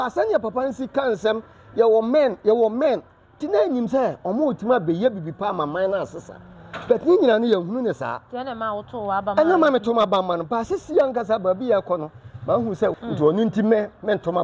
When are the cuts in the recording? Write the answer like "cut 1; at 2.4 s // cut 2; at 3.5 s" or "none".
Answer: cut 1; at 12.9 s